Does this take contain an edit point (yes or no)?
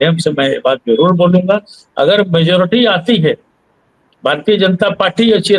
no